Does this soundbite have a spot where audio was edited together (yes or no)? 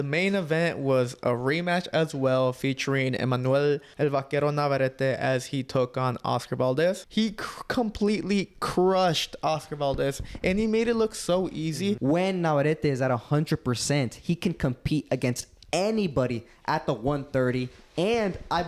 yes